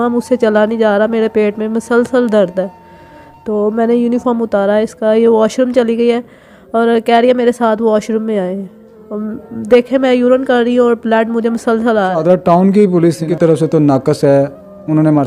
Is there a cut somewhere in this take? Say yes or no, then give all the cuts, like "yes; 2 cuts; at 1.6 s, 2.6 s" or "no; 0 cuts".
yes; 2 cuts; at 12.2 s, 13.3 s